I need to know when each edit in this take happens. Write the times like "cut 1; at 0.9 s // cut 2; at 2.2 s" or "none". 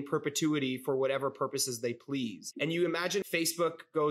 cut 1; at 2.4 s // cut 2; at 3.2 s